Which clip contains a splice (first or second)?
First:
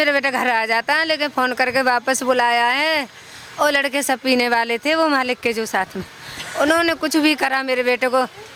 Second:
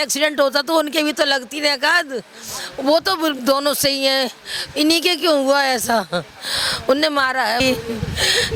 second